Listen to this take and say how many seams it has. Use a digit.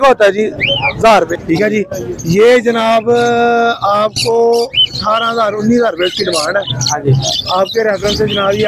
1